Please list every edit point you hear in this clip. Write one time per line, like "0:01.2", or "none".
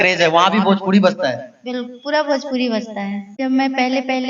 0:03.3